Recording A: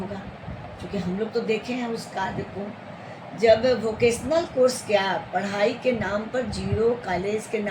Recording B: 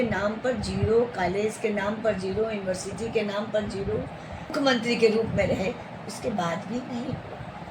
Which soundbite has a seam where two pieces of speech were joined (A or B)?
B